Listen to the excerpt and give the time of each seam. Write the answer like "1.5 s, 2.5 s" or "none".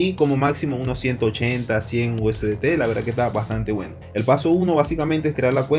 4.0 s

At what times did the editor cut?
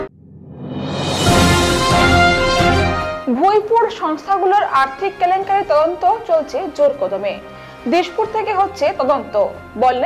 2.8 s

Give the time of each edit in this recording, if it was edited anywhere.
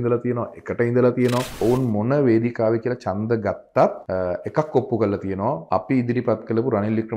1.5 s, 4.0 s, 5.6 s

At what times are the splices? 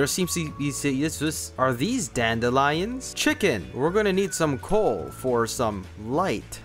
1.6 s

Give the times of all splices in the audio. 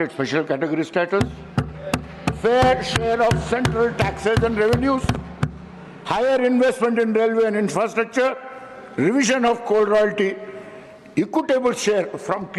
none

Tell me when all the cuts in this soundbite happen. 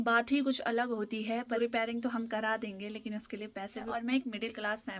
1.6 s, 3.9 s

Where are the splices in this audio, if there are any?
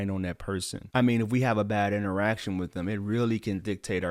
none

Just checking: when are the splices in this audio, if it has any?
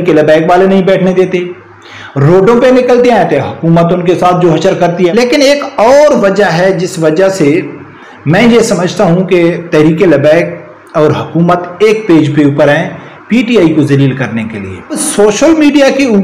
5.1 s, 15.0 s

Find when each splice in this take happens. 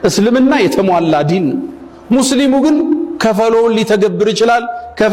none

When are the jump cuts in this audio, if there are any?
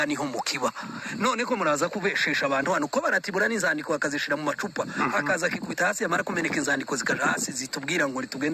4.9 s

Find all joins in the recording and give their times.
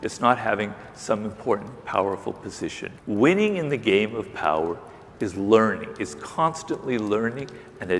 2.9 s

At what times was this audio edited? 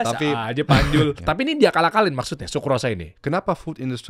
1.2 s, 3.1 s

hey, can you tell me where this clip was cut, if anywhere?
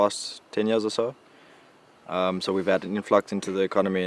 2.1 s

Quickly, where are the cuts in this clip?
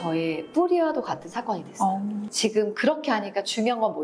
2.3 s

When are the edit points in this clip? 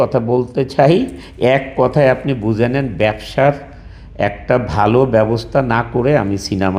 none

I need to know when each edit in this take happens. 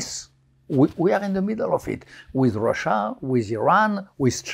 none

